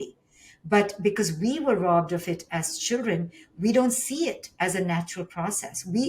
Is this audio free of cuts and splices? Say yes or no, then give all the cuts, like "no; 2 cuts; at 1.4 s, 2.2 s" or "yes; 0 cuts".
yes; 0 cuts